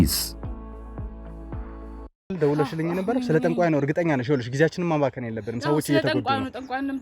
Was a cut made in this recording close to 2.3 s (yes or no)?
yes